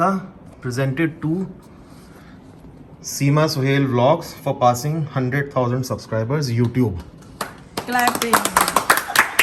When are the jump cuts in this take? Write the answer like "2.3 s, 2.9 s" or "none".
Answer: none

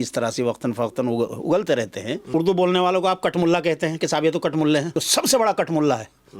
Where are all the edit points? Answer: 2.2 s, 5.0 s

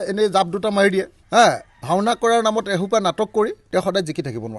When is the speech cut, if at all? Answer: 1.2 s, 3.6 s

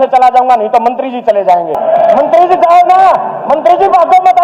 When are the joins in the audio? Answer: 1.8 s

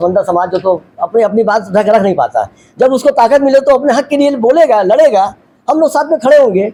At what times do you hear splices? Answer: none

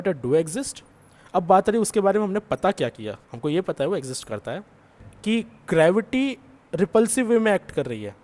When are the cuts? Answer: 5.1 s

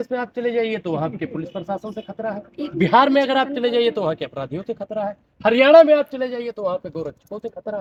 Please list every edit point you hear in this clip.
none

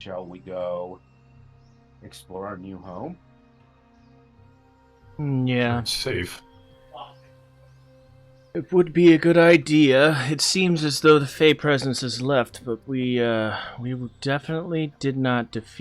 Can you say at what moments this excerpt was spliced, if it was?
4.8 s

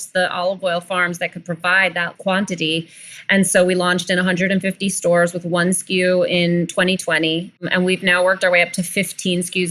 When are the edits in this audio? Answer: 2.1 s, 7.7 s

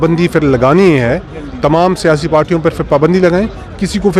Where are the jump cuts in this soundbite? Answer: none

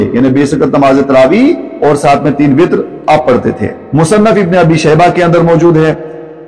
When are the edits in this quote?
3.7 s

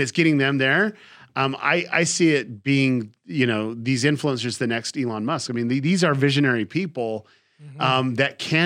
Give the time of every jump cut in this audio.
none

